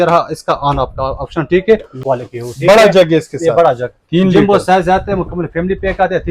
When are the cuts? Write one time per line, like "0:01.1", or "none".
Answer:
0:02.0